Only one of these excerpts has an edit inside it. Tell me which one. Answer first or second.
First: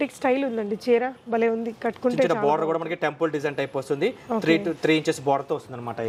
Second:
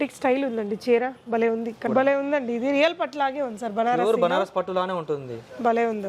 second